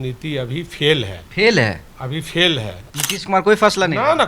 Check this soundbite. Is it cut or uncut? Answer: cut